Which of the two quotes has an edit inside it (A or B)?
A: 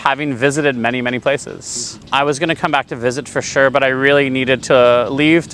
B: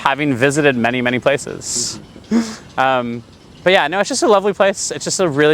A